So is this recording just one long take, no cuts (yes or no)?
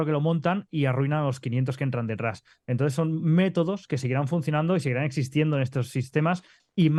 yes